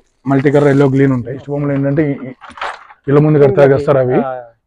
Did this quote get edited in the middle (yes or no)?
yes